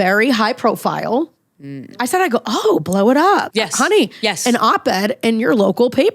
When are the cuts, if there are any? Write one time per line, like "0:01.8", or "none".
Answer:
0:02.0
0:03.5